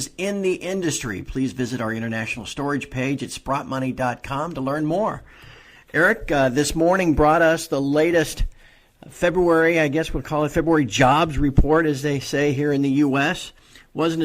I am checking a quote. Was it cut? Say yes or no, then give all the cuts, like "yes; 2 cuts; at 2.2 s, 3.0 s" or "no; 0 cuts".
yes; 1 cut; at 2.4 s